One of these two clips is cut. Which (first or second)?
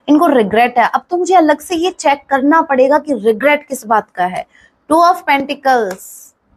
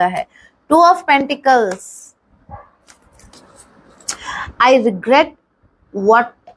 second